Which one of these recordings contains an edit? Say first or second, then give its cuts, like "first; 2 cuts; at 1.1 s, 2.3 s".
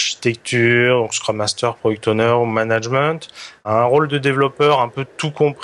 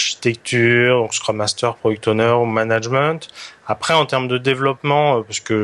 first; 1 cut; at 3.7 s